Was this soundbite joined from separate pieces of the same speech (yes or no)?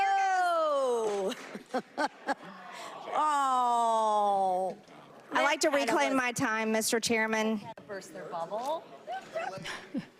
no